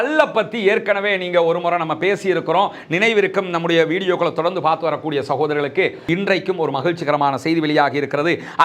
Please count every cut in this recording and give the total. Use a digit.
1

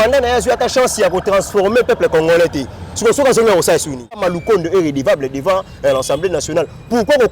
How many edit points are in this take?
1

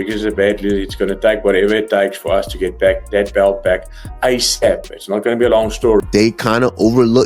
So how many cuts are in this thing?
1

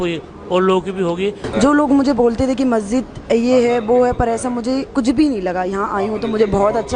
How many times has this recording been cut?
1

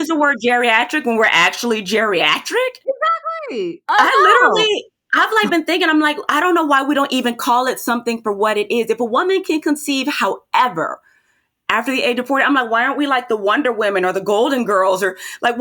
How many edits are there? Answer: 1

